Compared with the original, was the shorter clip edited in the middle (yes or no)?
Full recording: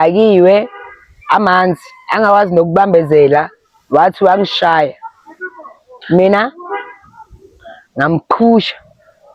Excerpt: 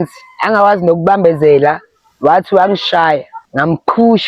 yes